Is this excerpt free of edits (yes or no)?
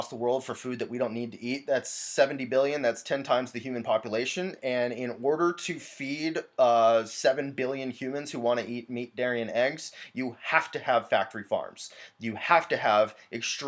yes